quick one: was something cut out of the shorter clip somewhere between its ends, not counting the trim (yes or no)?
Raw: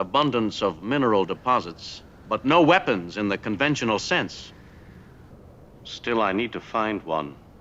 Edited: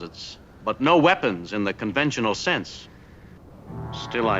yes